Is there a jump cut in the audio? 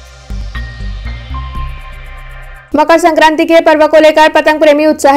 yes; 1 cut; at 2.5 s

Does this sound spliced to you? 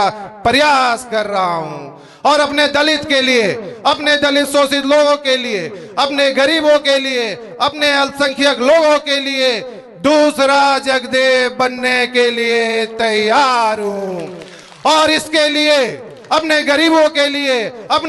no; 0 cuts

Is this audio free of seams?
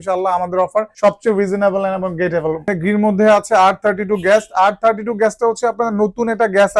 no; 2 cuts; at 0.9 s, 2.7 s

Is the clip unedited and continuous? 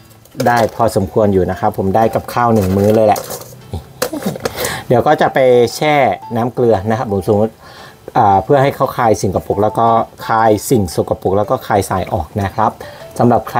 yes; 0 cuts

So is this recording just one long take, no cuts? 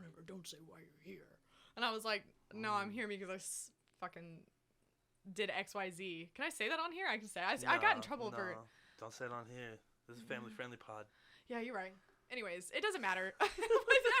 yes; 0 cuts

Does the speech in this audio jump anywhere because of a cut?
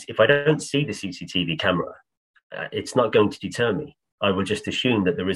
no; 0 cuts

